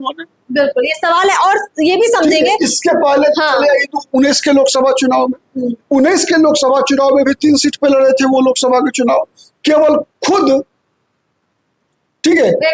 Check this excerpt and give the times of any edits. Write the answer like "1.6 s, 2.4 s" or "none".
none